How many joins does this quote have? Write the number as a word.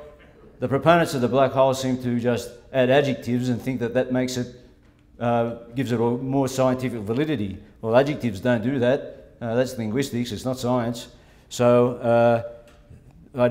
one